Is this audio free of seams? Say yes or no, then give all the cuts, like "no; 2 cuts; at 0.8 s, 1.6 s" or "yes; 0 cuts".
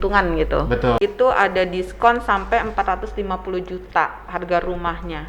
no; 1 cut; at 1.0 s